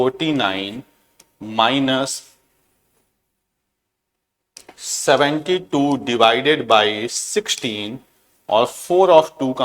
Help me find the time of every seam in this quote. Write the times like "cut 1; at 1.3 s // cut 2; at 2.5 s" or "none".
none